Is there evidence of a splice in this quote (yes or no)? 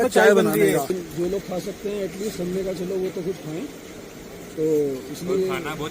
yes